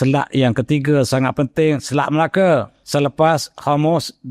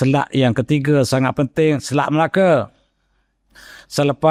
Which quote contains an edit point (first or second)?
first